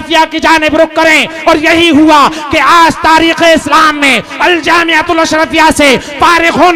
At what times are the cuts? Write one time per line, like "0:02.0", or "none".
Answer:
none